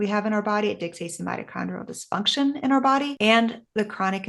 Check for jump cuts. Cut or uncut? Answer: cut